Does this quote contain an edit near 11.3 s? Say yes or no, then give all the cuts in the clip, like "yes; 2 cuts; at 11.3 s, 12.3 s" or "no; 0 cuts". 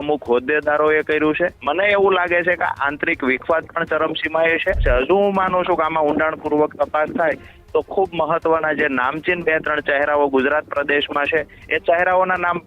no; 2 cuts; at 1.6 s, 4.8 s